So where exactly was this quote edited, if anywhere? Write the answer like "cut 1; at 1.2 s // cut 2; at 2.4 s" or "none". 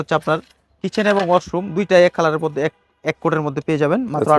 none